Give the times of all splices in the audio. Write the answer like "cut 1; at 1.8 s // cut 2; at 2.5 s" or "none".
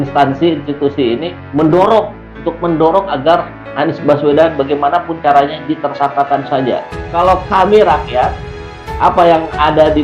cut 1; at 7.0 s